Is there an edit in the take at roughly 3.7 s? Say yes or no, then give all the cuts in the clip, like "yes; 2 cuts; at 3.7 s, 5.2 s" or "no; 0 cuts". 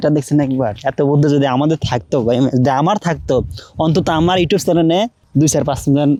no; 0 cuts